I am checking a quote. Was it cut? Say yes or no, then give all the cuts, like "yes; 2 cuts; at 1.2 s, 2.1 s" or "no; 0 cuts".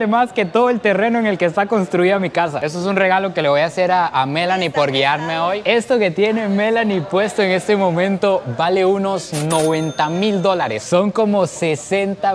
yes; 2 cuts; at 2.6 s, 5.6 s